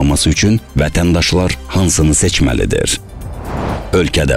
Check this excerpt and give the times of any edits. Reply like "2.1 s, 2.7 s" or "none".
3.4 s